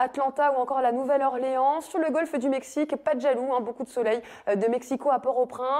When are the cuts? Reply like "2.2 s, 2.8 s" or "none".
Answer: 3.9 s